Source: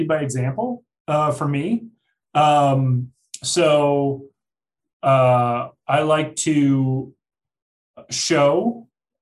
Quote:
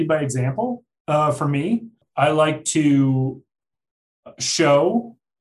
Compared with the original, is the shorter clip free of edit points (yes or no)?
no